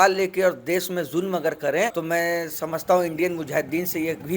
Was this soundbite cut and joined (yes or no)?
yes